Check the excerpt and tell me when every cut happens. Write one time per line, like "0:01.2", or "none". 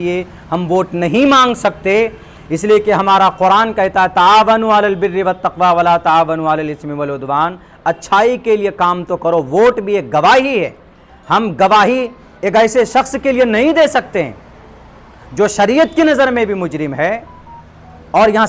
none